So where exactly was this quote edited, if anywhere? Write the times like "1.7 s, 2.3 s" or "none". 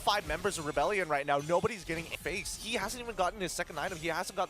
2.1 s

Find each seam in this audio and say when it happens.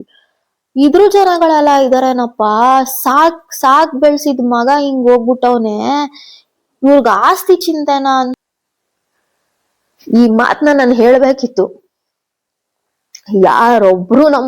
8.4 s

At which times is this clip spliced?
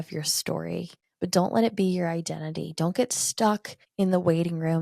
1.0 s, 3.8 s

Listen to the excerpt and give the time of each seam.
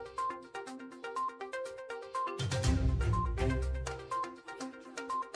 1.5 s

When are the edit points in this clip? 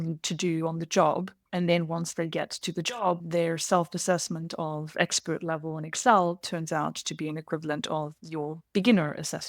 1.4 s, 3.2 s, 8.2 s

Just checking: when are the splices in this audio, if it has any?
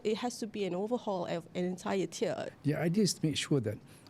2.5 s

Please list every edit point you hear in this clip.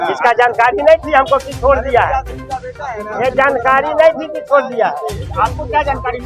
none

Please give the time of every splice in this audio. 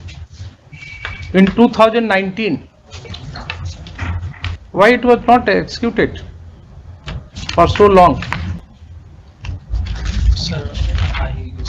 4.6 s

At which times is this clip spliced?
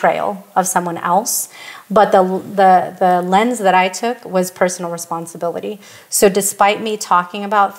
none

